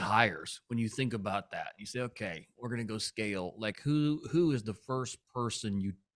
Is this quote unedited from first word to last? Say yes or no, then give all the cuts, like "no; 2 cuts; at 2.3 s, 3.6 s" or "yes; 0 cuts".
yes; 0 cuts